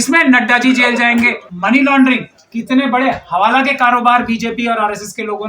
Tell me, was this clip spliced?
yes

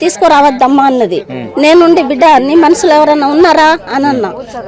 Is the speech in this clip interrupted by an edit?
no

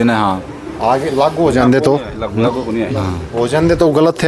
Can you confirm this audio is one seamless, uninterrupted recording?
yes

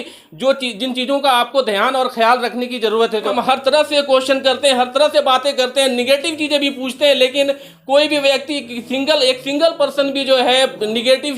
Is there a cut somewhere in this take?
yes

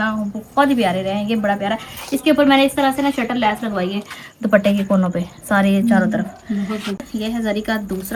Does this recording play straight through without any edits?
yes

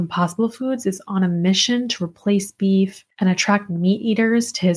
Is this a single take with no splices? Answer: no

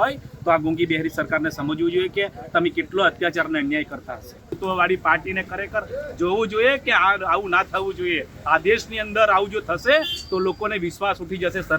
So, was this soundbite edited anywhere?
yes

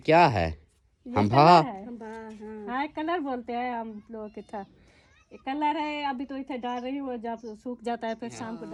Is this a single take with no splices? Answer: yes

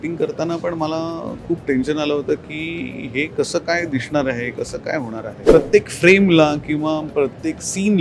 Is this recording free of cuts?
no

